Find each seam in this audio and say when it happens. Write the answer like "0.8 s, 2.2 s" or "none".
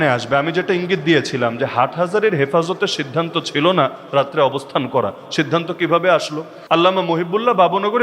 6.6 s